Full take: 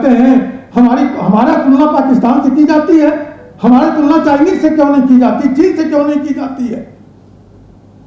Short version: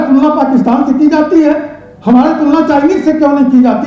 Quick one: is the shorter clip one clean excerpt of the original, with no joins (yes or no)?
yes